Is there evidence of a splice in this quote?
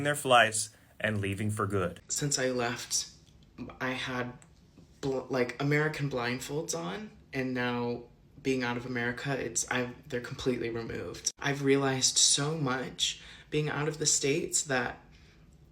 yes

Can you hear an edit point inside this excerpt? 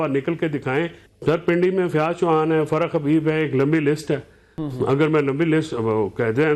yes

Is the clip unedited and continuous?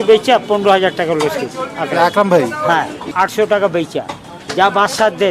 no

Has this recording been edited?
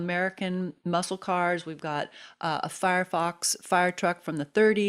no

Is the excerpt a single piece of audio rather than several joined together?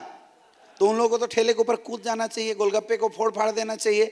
yes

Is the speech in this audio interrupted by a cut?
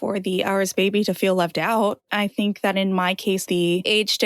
yes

